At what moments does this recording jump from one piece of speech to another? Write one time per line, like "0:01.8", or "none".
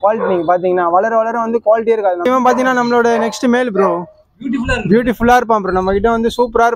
0:02.3